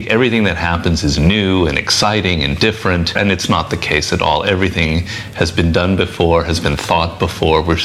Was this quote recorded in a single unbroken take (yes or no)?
no